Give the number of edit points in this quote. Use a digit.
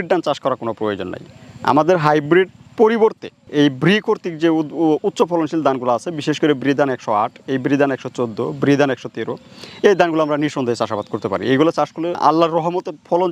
0